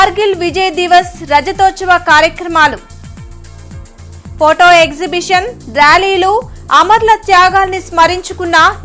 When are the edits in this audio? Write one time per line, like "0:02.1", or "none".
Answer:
none